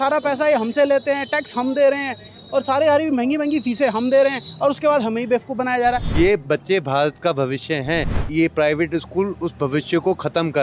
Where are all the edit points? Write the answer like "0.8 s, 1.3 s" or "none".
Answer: 6.1 s, 8.2 s